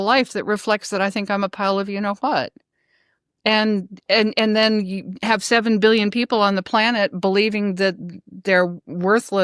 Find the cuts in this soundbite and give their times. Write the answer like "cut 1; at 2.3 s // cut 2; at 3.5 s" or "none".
none